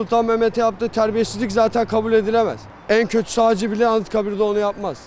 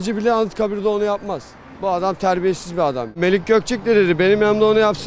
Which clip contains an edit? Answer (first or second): second